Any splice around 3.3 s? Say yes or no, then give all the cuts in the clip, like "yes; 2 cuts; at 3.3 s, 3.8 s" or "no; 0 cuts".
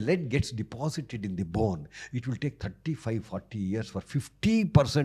no; 0 cuts